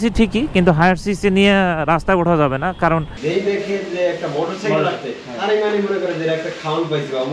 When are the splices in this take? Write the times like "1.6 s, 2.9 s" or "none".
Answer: 3.1 s